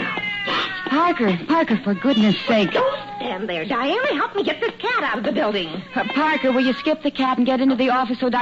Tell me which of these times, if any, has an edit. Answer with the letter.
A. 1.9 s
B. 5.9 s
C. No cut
C